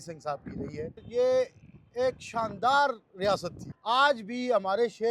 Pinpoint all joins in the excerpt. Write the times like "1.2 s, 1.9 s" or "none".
1.0 s, 3.7 s